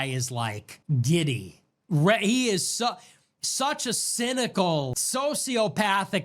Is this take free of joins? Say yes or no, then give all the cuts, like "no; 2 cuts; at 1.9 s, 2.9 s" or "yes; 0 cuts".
no; 1 cut; at 5.0 s